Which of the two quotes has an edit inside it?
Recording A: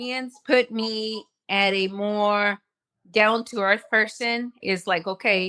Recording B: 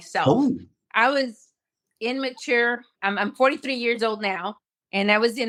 A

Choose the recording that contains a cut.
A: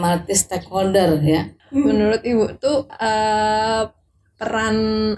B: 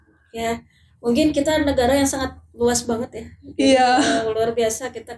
A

